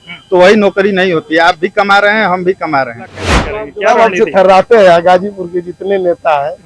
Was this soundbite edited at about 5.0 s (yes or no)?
no